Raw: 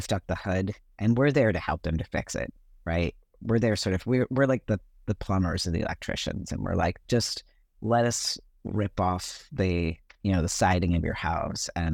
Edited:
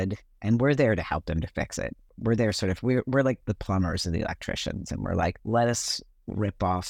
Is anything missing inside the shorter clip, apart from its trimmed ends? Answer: yes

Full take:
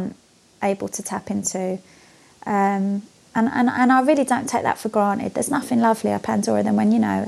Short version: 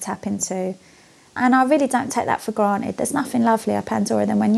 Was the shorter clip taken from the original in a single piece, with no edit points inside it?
no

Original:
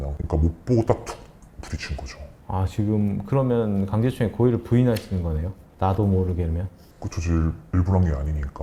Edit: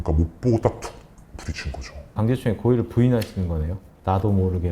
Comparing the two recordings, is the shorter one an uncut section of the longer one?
no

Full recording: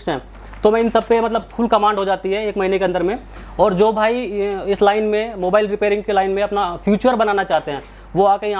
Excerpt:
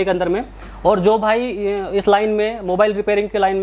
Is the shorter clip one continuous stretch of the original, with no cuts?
yes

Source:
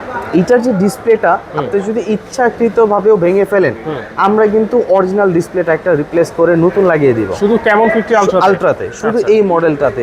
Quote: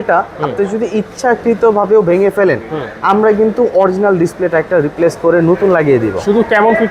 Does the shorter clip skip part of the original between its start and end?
no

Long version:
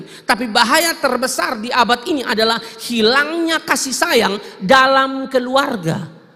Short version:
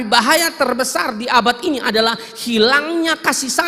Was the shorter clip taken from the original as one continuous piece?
yes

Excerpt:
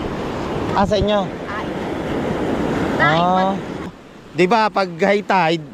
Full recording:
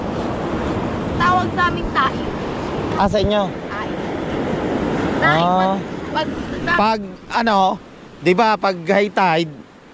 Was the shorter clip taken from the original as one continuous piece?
no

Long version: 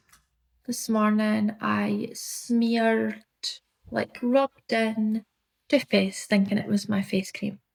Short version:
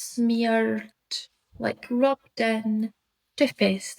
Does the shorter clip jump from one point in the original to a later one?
no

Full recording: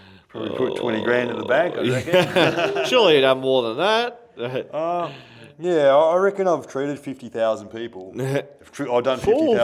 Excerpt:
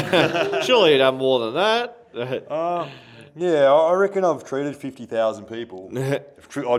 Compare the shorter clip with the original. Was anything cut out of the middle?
no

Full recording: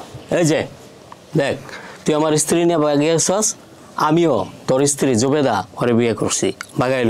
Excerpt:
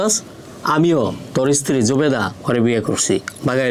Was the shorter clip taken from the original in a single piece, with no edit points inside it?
yes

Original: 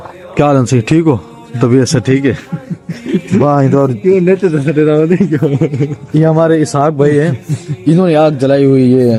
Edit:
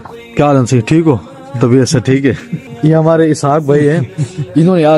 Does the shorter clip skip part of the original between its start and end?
yes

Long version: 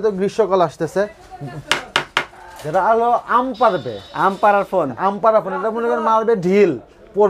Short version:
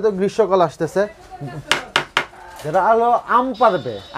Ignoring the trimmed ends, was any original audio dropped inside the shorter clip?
no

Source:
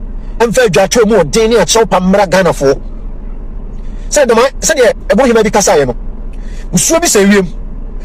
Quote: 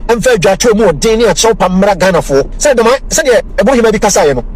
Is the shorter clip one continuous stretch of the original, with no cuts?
no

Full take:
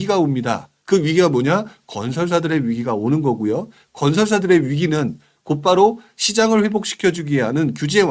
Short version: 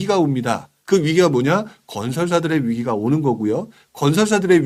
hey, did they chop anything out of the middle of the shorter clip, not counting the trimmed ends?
no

